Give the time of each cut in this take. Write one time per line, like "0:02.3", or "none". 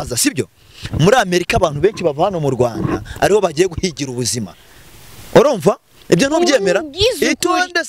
none